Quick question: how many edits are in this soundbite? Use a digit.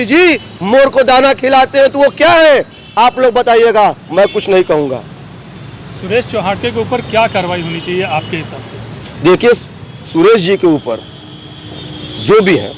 0